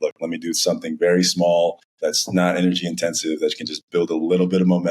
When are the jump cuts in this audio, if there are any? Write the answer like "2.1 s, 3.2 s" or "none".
1.9 s